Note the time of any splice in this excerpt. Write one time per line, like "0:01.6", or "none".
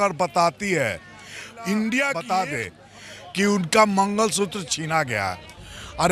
0:02.2